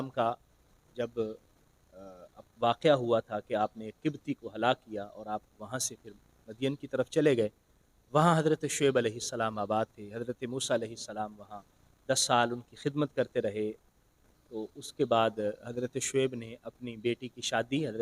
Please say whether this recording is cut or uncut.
uncut